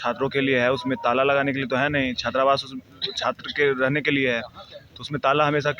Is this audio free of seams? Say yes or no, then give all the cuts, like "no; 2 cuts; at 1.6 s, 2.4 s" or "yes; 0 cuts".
yes; 0 cuts